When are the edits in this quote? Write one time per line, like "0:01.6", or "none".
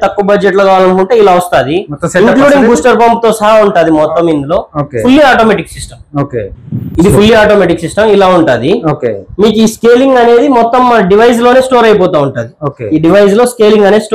none